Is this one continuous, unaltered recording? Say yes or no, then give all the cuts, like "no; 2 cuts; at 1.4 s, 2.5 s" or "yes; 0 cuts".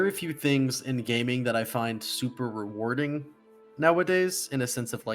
yes; 0 cuts